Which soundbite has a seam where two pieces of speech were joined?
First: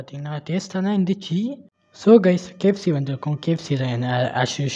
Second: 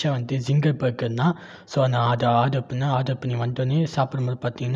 first; 1 cut; at 1.9 s

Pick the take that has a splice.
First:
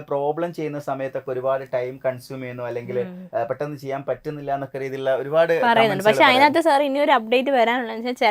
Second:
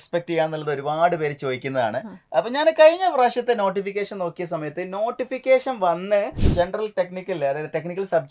second; 1 cut; at 6.4 s

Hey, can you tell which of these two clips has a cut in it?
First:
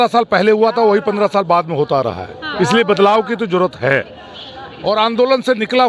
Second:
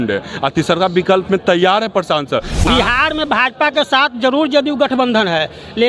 second; 1 cut; at 2.7 s

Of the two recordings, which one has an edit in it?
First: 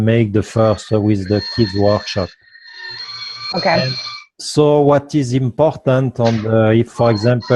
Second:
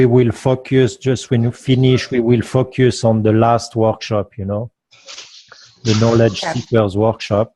second; 1 cut; at 6.2 s

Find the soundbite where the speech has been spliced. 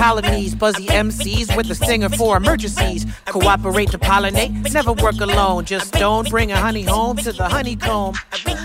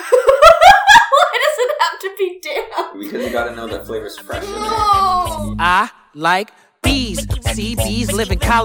second; 1 cut; at 5.4 s

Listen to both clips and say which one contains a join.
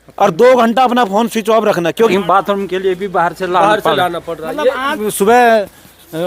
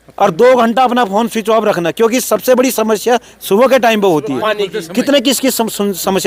first; 2 cuts; at 2.1 s, 5.0 s

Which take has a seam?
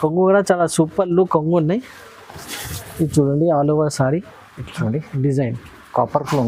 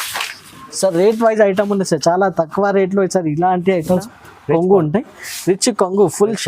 second; 1 cut; at 4.0 s

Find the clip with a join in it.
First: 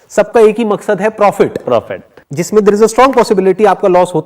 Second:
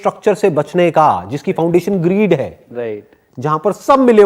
first; 1 cut; at 1.7 s

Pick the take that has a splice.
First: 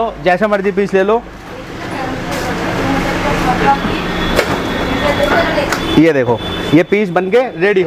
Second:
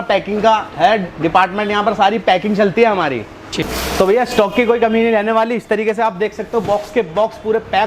second; 1 cut; at 3.7 s

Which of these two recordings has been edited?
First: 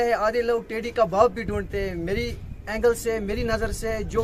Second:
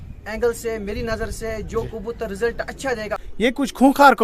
second; 1 cut; at 3.3 s

